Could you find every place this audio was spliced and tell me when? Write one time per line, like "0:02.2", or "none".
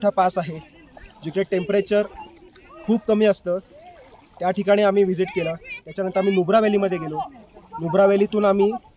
none